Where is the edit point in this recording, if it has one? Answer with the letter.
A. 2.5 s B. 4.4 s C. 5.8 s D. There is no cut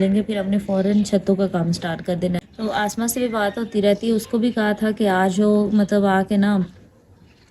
A